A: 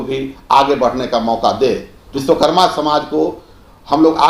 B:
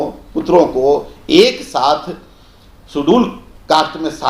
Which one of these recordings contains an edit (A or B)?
A